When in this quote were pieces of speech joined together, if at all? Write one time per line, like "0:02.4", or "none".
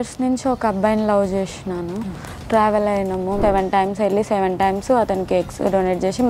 0:03.4